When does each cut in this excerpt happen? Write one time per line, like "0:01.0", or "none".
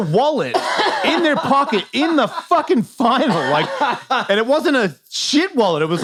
none